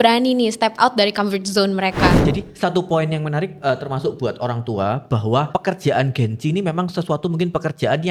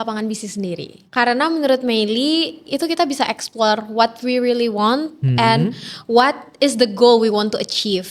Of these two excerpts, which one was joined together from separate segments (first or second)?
first